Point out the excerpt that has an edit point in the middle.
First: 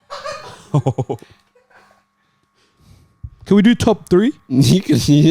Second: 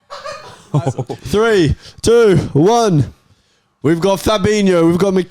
second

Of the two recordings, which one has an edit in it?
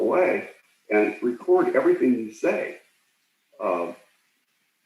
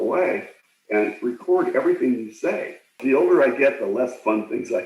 second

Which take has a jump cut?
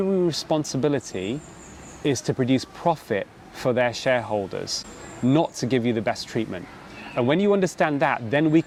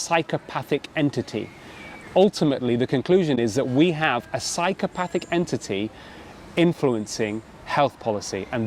second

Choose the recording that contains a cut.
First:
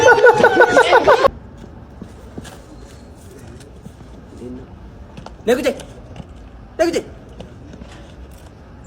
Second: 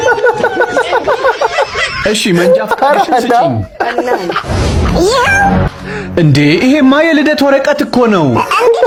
first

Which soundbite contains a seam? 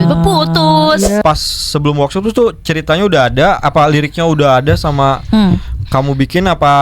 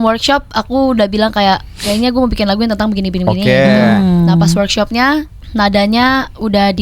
first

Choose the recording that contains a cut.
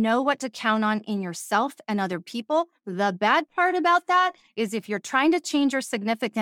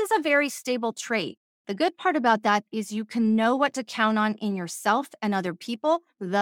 second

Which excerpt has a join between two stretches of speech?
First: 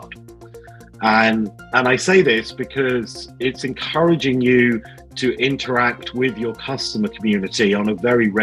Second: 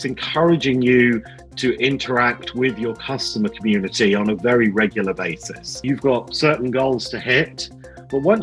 second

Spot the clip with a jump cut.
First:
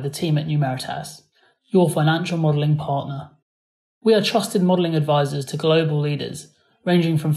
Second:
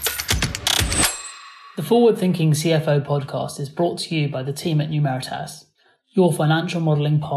second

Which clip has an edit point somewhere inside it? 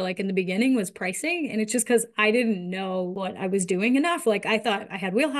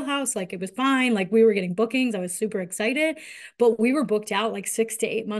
first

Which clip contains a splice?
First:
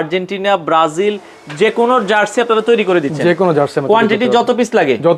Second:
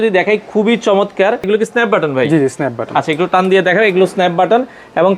second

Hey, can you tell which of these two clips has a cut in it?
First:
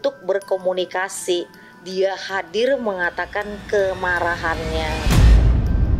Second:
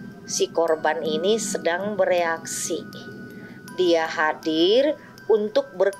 first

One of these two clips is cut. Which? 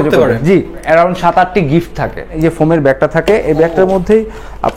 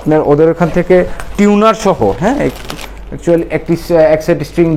first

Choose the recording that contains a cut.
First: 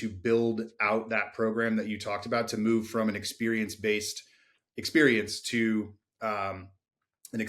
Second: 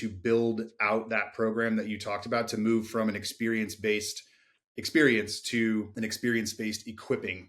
second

